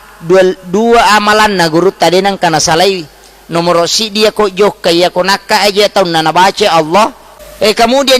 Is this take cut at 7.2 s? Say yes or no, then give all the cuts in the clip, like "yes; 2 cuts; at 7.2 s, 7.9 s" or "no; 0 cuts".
yes; 1 cut; at 7.2 s